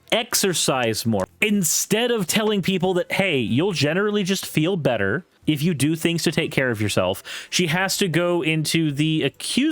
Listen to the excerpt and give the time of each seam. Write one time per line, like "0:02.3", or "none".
0:01.3
0:05.3